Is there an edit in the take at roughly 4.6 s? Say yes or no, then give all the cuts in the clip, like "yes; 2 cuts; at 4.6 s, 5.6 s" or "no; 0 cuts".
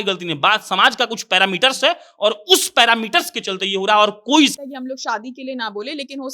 yes; 1 cut; at 4.6 s